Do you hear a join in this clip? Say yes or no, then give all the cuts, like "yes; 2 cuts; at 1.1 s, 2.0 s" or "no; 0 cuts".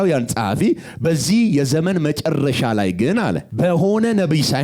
yes; 1 cut; at 3.5 s